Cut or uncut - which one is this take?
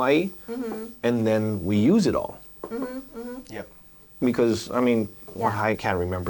uncut